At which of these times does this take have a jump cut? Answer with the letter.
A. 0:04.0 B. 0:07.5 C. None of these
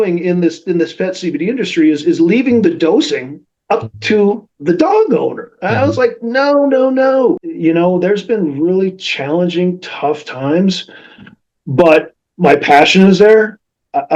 B